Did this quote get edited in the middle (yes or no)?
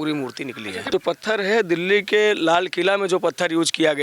yes